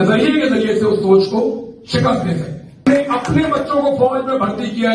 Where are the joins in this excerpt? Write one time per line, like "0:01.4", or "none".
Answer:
0:02.8